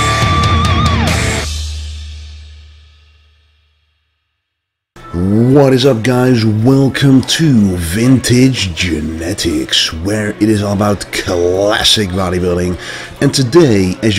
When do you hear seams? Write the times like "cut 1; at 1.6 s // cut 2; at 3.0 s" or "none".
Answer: none